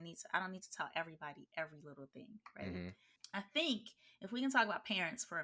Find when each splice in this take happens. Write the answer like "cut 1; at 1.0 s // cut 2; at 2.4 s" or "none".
cut 1; at 3.1 s